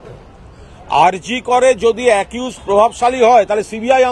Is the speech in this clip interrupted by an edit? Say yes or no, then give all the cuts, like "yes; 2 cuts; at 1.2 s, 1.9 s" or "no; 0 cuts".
no; 0 cuts